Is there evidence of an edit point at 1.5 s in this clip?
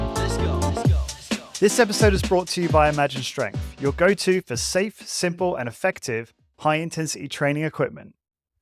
yes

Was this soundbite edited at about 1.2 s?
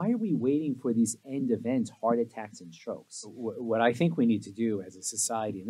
no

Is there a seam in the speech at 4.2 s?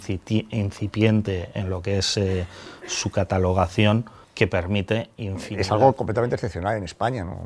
yes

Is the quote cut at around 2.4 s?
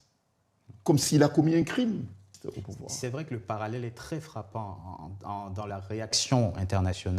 yes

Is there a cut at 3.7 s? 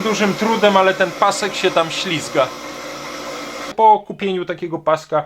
yes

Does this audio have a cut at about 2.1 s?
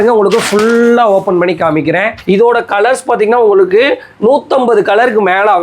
yes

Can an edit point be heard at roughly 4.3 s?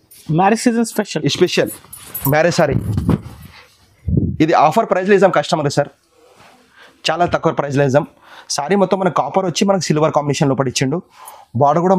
no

